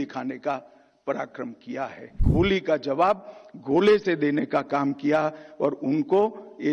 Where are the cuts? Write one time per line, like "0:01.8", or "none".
0:02.1

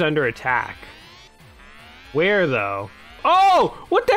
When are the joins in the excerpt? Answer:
0:03.2

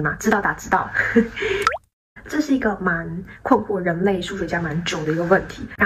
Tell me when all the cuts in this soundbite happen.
none

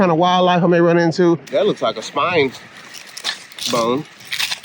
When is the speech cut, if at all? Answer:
0:01.4

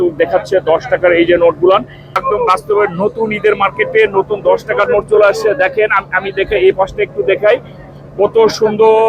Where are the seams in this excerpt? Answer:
0:02.2

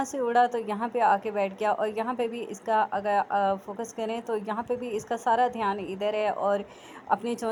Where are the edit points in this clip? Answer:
none

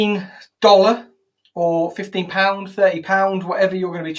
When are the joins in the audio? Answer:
none

